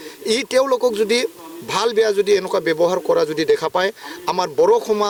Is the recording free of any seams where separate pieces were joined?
yes; 0 cuts

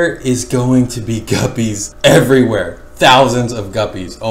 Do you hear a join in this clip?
no; 0 cuts

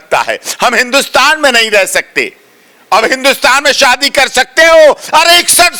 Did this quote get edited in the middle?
no; 0 cuts

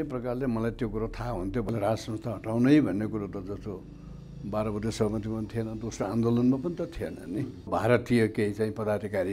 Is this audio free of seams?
no; 2 cuts; at 1.7 s, 7.7 s

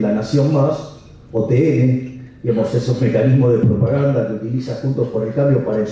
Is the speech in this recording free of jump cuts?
yes; 0 cuts

